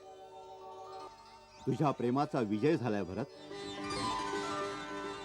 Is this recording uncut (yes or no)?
no